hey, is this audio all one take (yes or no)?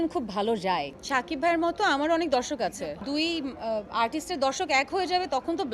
no